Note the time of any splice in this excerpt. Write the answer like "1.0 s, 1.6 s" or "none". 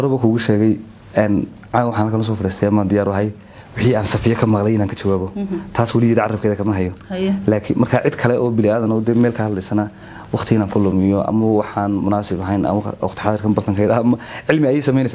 none